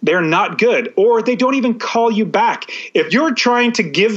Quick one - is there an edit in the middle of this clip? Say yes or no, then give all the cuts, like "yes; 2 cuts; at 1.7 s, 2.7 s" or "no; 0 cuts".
yes; 1 cut; at 3.1 s